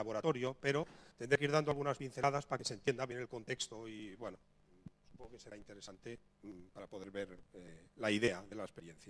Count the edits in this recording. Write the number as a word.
one